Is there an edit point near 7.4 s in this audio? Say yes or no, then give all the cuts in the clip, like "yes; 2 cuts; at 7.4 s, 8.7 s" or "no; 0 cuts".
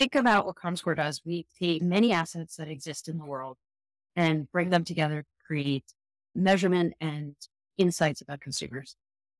no; 1 cut; at 1.8 s